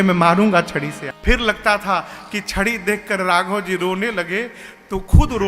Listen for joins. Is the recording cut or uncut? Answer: cut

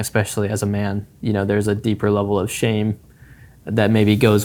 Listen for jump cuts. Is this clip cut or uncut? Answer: uncut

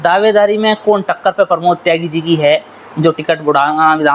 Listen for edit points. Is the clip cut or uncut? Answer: uncut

